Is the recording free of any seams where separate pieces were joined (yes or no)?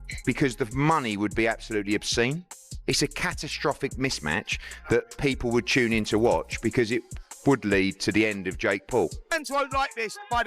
no